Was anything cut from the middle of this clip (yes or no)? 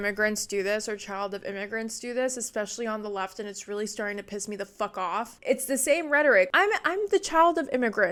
no